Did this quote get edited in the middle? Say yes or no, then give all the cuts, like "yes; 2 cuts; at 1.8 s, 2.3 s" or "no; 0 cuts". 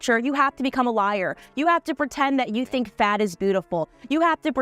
no; 0 cuts